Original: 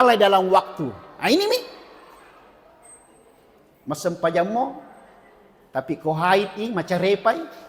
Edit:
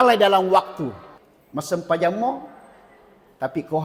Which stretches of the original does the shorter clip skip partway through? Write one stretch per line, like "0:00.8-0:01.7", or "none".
0:01.0-0:03.4

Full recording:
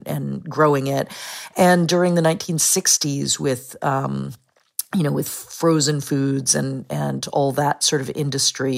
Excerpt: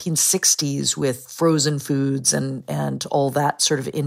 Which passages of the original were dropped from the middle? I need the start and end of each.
0:03.7-0:05.5

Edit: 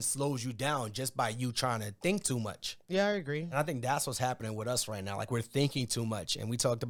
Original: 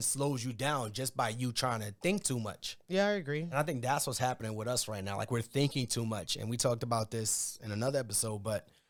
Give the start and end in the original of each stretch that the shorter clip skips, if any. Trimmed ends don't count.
none

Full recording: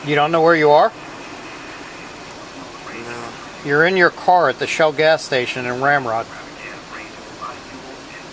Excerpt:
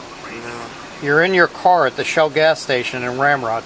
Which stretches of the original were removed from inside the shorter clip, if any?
none

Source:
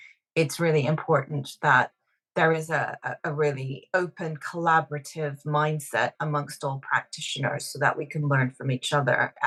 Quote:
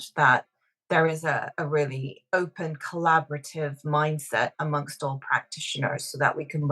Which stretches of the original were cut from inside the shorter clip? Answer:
0:03.4-0:03.5

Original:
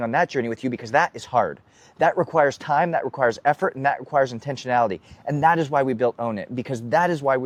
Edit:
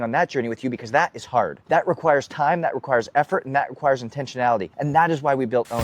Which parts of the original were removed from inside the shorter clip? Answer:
0:01.6-0:01.9
0:05.0-0:05.2

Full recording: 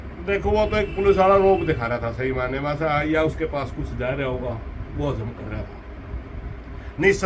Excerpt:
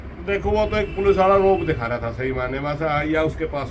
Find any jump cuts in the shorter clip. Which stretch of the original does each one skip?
none

